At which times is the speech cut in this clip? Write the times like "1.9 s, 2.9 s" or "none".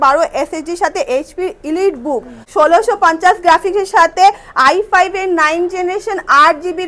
2.4 s